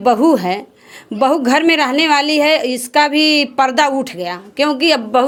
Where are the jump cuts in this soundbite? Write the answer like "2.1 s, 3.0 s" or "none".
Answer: none